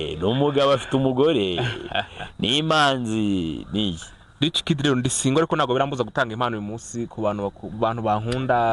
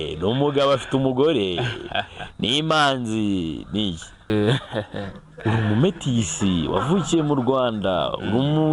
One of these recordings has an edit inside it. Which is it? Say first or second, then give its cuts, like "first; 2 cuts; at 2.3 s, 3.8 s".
second; 1 cut; at 4.3 s